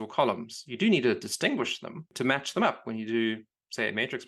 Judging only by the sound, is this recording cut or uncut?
cut